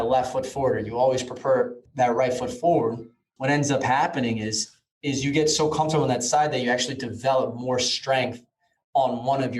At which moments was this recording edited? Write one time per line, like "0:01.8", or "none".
0:01.8